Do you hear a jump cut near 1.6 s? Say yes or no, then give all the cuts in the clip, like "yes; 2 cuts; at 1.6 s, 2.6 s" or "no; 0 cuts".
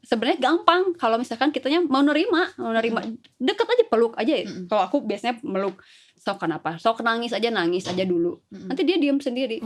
no; 0 cuts